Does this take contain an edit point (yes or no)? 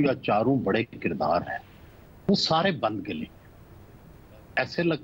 no